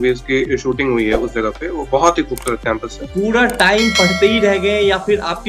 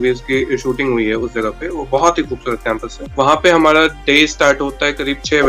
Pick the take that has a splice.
first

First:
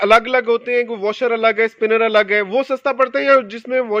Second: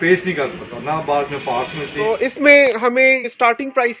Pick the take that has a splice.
second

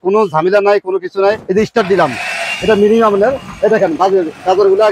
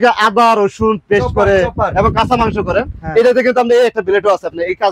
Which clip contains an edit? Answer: first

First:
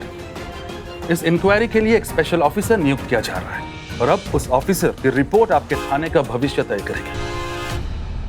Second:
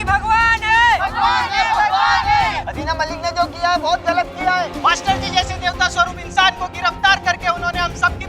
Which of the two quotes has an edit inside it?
first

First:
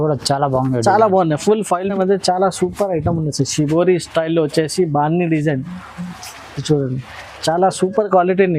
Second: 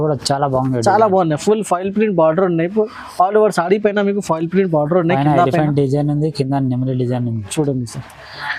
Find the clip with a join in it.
first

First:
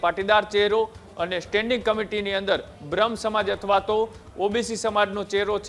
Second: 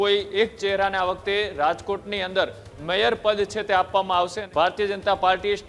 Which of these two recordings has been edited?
second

